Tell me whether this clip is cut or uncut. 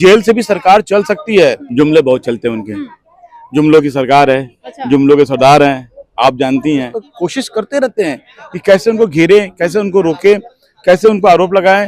cut